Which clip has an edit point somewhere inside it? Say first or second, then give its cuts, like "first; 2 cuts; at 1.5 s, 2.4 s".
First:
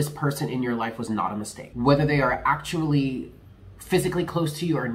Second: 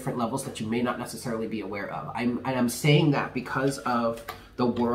first; 1 cut; at 1.6 s